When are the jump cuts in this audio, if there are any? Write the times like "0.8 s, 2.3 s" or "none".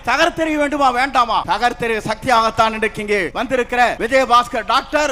1.4 s, 3.6 s